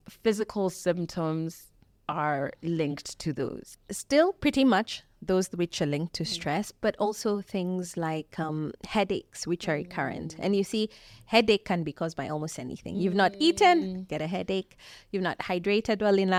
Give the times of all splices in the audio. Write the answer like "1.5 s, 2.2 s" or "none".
none

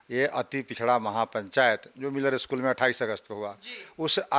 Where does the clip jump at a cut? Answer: none

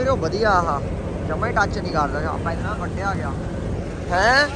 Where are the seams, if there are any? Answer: none

